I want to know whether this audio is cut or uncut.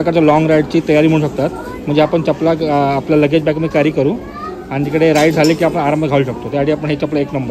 uncut